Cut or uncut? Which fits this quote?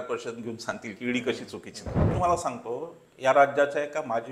cut